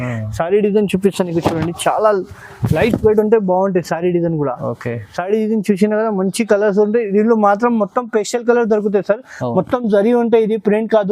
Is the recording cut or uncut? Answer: uncut